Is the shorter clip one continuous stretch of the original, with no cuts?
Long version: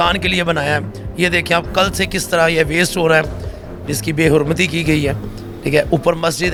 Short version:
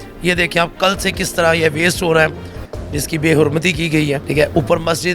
no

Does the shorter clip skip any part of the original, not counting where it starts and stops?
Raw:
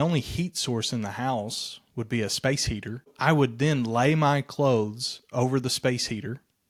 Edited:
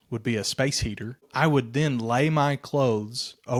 no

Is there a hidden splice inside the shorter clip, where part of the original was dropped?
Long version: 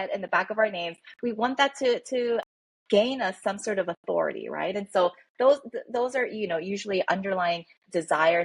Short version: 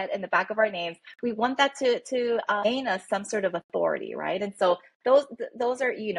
yes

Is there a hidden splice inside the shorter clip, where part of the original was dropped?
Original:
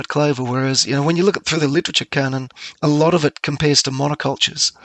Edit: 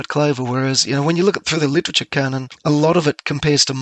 yes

